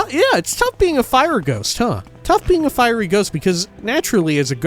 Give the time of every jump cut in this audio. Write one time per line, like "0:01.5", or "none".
0:02.1
0:03.7